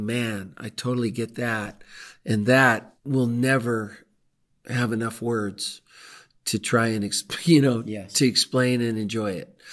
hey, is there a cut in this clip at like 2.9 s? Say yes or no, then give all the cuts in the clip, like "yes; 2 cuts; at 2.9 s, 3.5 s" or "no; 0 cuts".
yes; 1 cut; at 2.9 s